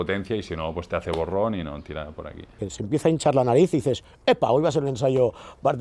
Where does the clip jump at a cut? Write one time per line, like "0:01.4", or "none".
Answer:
0:02.7